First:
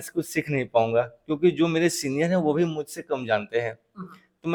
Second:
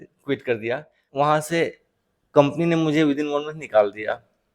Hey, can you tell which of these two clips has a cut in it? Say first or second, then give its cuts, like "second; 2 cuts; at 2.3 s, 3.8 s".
second; 1 cut; at 1.0 s